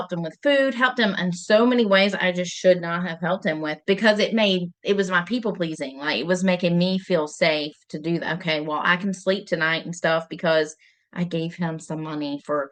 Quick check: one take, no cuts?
yes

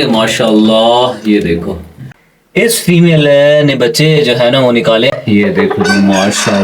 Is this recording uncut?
no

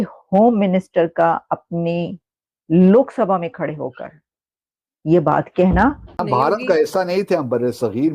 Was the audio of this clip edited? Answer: yes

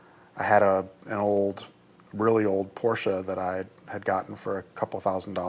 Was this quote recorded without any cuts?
yes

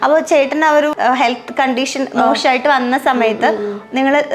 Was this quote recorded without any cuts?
no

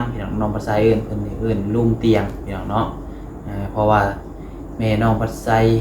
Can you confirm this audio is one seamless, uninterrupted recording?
yes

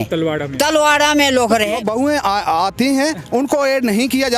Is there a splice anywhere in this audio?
yes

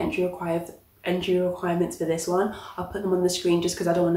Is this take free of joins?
yes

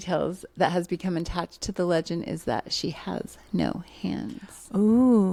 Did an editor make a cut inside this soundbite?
no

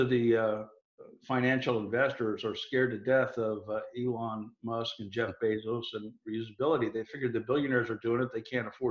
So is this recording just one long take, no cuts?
yes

